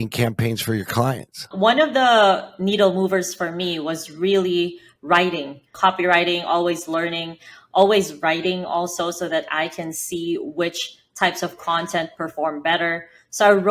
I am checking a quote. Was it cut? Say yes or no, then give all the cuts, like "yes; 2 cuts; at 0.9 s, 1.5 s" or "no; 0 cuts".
yes; 2 cuts; at 1.5 s, 5.7 s